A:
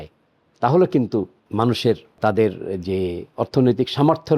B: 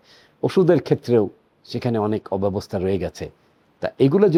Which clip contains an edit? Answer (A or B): A